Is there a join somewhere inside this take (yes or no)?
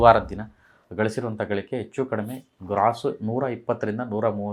no